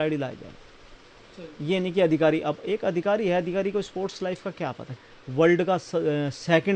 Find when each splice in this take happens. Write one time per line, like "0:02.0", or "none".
0:04.9

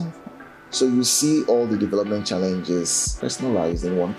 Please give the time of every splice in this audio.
0:03.0

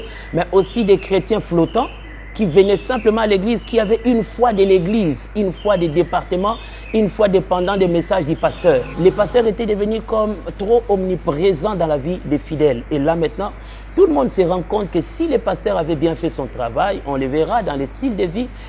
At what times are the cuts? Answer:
0:08.9

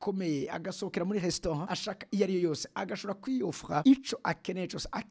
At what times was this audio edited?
0:01.7
0:03.8

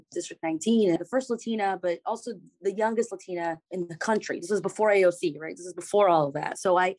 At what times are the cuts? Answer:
0:01.0

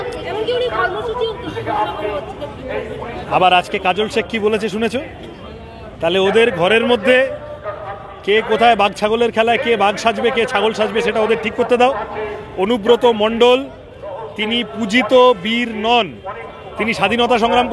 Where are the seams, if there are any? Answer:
none

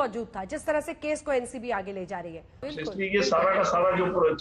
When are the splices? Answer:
0:02.7

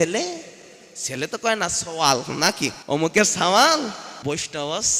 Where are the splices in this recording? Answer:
0:02.8
0:04.1

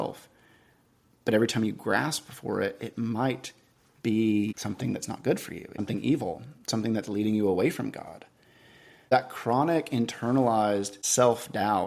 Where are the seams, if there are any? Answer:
0:04.6
0:05.8
0:09.1
0:11.0

